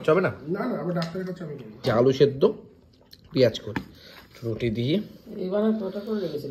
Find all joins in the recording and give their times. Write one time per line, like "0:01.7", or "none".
0:01.8